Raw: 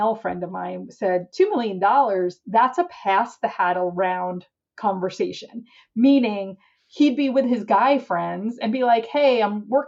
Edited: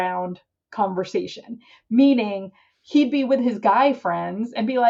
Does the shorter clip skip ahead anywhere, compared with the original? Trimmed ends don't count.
no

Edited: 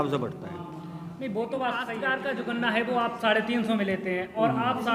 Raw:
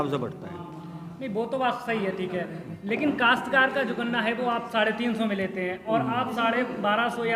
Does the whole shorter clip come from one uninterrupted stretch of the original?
no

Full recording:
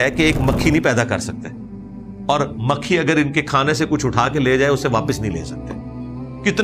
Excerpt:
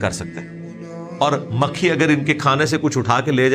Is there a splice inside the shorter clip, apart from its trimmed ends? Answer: no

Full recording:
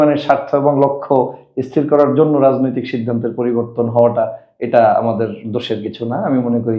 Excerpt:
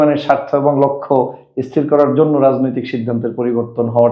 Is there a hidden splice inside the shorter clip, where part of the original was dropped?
no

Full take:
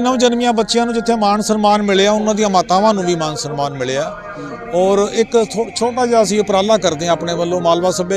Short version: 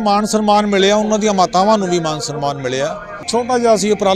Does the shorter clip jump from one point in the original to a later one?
yes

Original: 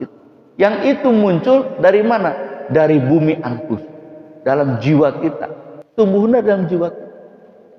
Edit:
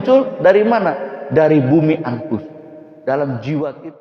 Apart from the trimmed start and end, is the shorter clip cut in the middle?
no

